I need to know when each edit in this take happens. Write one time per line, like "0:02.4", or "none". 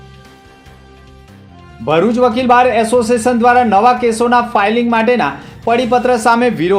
0:01.0